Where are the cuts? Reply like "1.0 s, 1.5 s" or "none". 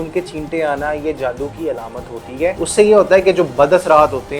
2.6 s